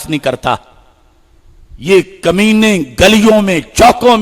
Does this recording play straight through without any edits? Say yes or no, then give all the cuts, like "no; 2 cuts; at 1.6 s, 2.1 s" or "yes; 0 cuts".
yes; 0 cuts